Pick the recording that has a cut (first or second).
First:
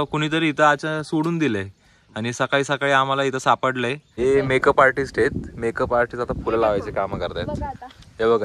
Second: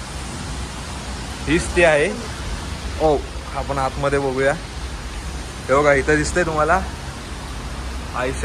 first